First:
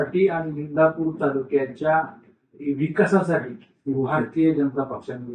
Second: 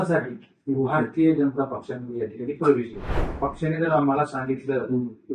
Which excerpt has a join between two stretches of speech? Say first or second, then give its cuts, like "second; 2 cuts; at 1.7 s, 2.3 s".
second; 1 cut; at 3.2 s